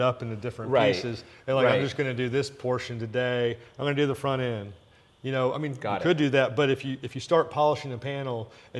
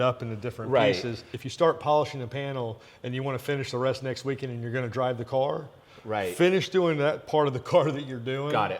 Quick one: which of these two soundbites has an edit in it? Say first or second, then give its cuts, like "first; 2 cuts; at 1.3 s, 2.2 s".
second; 1 cut; at 1.3 s